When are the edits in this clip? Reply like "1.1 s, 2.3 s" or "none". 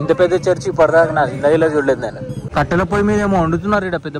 2.4 s